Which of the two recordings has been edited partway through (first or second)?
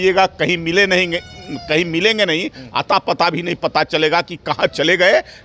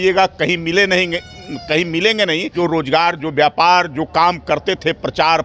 second